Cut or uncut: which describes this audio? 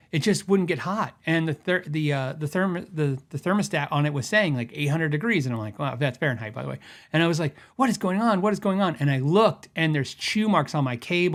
uncut